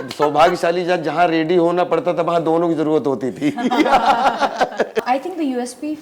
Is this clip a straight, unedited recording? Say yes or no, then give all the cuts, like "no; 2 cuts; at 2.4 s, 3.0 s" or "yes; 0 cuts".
no; 1 cut; at 5.0 s